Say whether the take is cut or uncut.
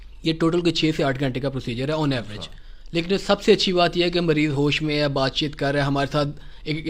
uncut